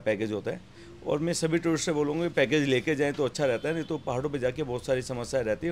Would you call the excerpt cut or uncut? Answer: uncut